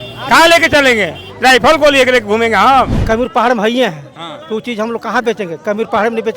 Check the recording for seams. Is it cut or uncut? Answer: cut